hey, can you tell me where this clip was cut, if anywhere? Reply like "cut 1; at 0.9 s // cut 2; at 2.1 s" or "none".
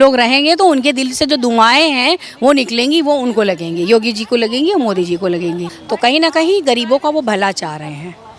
cut 1; at 5.7 s